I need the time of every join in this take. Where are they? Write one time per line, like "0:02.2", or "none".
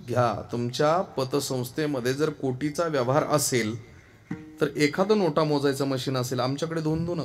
none